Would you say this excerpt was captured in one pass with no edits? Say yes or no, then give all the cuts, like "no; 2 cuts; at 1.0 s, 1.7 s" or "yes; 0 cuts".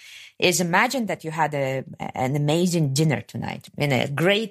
no; 1 cut; at 3.6 s